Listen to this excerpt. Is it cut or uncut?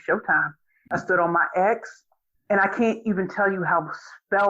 cut